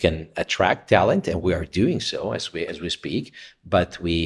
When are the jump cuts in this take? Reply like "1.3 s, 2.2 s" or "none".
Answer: 1.4 s